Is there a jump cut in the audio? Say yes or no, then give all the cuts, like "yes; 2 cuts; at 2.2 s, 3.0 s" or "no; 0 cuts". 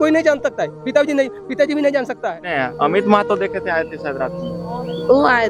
yes; 1 cut; at 2.5 s